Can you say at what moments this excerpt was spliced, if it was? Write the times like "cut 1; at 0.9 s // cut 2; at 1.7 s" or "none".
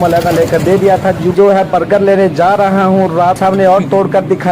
cut 1; at 1.3 s // cut 2; at 3.4 s